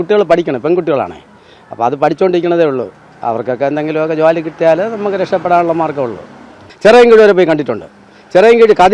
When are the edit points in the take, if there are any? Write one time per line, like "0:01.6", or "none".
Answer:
0:06.7